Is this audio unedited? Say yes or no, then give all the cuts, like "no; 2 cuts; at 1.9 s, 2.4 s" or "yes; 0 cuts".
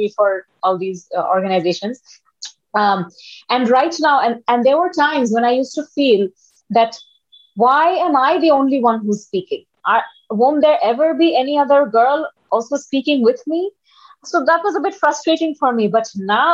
yes; 0 cuts